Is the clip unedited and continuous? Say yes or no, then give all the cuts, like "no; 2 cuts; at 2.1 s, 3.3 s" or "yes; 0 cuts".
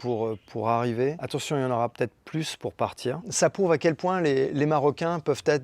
no; 2 cuts; at 1.2 s, 3.3 s